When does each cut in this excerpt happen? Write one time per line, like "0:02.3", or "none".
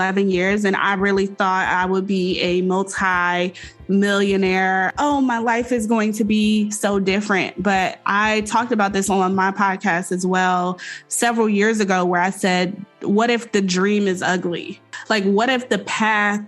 0:04.9
0:14.9

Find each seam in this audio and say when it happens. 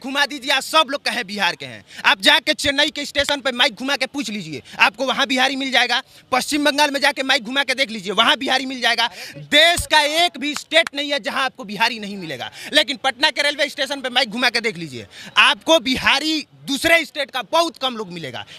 none

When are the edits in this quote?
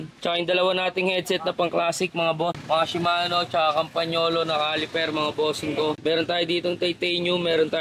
0:02.6
0:06.0

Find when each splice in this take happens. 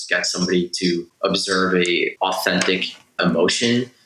0:01.1
0:02.1
0:03.2

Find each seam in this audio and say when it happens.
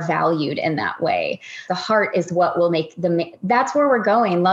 0:01.6

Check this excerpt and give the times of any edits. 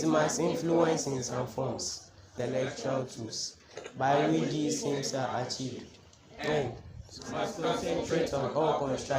0:02.3

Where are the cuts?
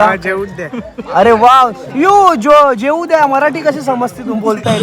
none

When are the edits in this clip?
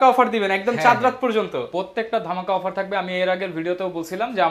none

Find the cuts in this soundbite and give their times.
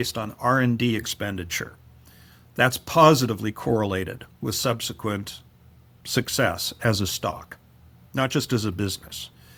none

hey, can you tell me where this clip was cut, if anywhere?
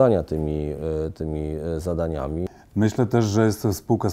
0:02.4

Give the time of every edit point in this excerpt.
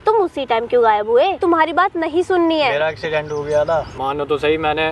0:01.4
0:03.9

